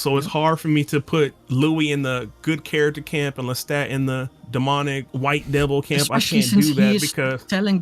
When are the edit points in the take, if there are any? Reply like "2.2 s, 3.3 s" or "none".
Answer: 1.4 s, 4.4 s, 5.1 s

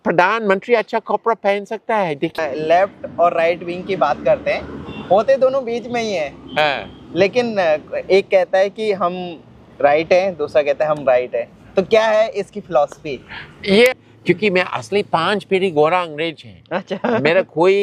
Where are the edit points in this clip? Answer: 2.4 s, 14.0 s

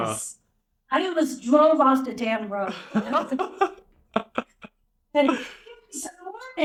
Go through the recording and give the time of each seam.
none

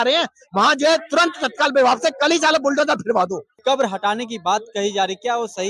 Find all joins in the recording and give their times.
3.5 s

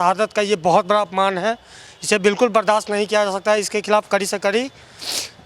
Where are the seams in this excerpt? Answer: none

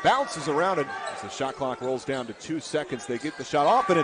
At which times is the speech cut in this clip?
0.9 s

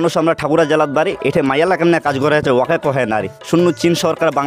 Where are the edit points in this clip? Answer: none

